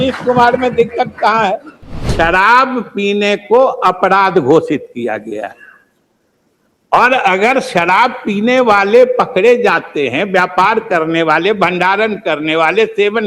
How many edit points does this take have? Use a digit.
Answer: 1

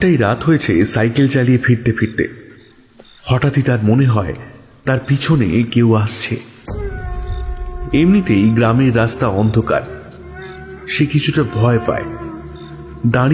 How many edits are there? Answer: 0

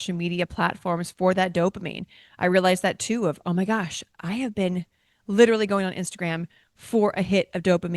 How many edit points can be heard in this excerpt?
0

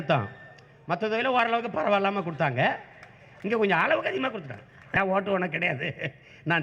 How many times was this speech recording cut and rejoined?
1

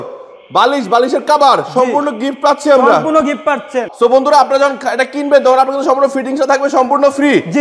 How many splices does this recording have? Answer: 1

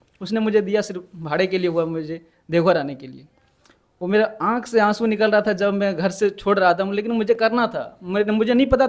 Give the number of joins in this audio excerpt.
0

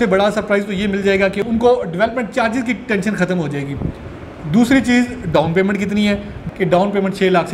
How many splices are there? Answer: 1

